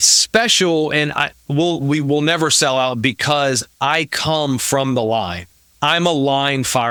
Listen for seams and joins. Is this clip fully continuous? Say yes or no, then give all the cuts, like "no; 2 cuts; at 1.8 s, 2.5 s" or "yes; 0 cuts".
yes; 0 cuts